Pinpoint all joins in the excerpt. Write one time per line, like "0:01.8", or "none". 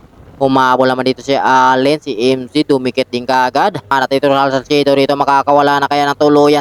0:03.9